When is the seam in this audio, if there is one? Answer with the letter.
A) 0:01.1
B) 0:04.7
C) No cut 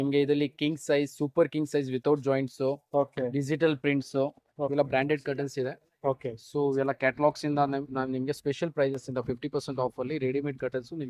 B